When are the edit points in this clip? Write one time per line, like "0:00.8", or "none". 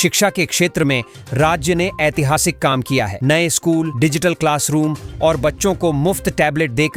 none